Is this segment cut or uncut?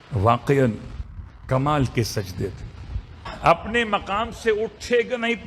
cut